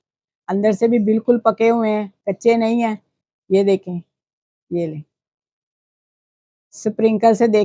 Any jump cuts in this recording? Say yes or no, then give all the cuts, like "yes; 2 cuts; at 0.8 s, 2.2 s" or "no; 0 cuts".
no; 0 cuts